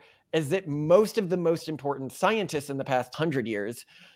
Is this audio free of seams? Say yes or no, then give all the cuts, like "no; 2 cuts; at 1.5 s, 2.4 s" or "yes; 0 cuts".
no; 1 cut; at 3.1 s